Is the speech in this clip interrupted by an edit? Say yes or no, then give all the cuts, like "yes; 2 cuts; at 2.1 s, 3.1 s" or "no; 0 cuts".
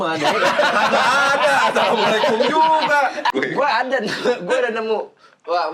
yes; 1 cut; at 3.3 s